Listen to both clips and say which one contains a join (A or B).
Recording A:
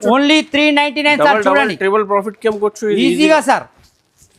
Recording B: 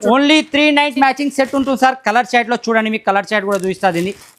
B